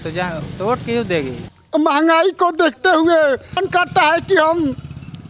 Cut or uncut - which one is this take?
cut